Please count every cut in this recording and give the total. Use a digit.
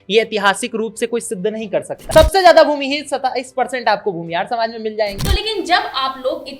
2